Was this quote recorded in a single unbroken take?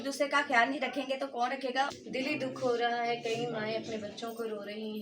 no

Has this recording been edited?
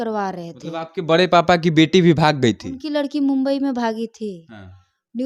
no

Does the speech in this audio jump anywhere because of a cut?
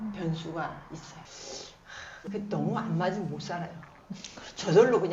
yes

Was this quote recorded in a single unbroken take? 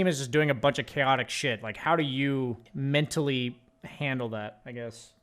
no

